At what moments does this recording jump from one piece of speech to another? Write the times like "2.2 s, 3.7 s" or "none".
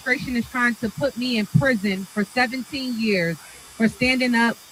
none